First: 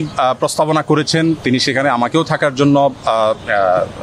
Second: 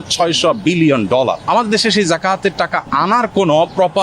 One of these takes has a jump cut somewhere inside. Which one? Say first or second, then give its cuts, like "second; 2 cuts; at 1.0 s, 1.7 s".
second; 1 cut; at 1.4 s